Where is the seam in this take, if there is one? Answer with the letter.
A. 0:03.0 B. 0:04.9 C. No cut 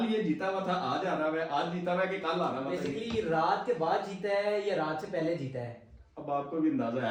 C